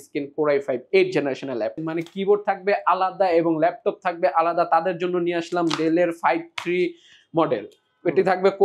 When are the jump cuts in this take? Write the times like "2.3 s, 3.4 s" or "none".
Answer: 1.8 s